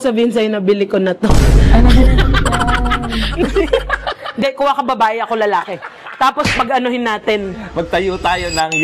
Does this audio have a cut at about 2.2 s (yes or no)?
no